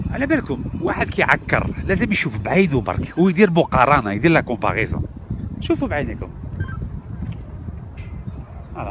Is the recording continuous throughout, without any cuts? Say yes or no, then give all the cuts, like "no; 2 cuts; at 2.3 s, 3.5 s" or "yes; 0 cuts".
yes; 0 cuts